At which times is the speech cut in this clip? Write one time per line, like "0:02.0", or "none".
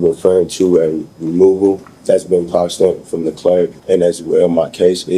0:01.9
0:03.8

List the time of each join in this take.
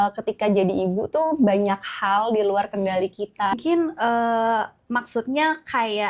0:03.5

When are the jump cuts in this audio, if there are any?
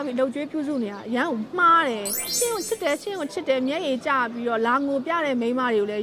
0:02.3

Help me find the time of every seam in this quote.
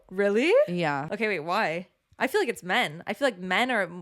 0:01.1

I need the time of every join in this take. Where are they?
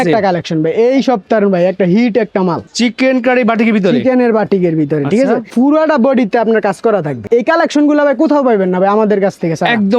0:02.7
0:05.5
0:07.2

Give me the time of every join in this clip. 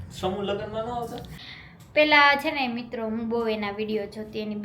0:01.3

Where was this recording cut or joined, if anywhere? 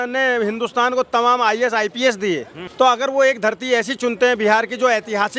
0:02.6

